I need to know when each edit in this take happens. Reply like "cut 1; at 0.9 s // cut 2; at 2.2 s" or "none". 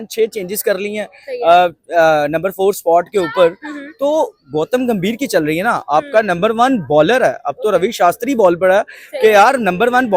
none